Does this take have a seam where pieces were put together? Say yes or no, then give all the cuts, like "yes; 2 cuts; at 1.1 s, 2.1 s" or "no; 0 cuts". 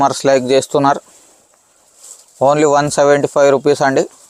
no; 0 cuts